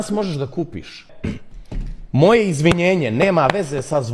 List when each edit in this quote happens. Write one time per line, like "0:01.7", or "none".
0:01.1